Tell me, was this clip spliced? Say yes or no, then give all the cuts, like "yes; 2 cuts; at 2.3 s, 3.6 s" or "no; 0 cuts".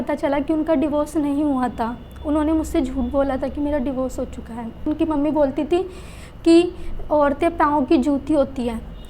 yes; 1 cut; at 4.8 s